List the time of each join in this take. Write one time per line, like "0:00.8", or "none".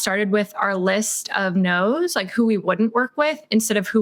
none